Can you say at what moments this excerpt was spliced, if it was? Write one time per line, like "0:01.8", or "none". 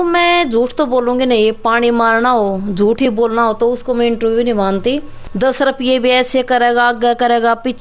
0:05.2

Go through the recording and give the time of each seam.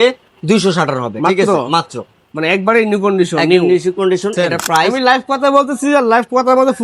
0:05.0

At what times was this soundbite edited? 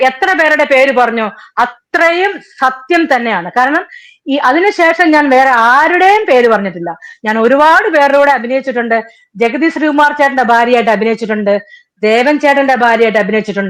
none

